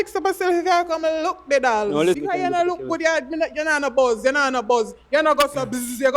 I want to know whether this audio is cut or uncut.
cut